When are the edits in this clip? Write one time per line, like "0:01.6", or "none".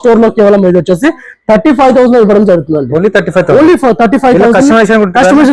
none